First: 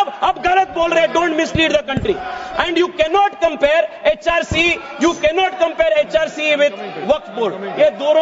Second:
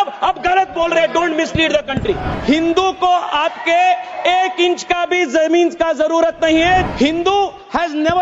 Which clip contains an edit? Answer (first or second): second